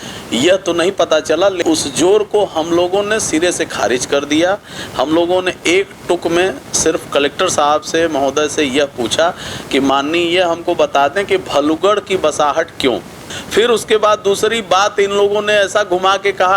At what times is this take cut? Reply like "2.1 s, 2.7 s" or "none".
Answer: 1.6 s, 13.3 s